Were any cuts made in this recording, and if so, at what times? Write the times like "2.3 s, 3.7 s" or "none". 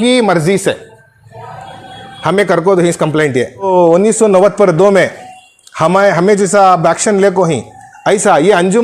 3.5 s